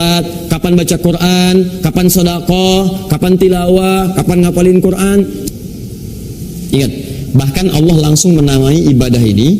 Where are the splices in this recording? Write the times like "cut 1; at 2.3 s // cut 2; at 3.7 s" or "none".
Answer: cut 1; at 5.4 s